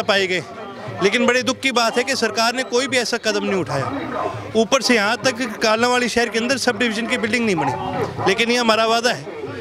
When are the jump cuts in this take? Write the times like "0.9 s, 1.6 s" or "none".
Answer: none